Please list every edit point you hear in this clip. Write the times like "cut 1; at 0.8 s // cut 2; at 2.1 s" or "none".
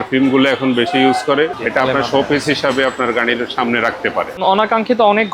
cut 1; at 1.6 s // cut 2; at 4.4 s